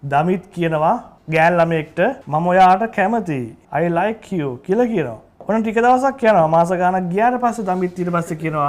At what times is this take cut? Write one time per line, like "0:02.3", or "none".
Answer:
0:01.1
0:02.2
0:03.5
0:05.3